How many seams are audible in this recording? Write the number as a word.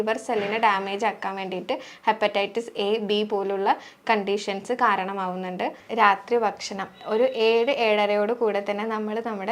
one